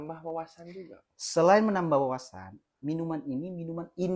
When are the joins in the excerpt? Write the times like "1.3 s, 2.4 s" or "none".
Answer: none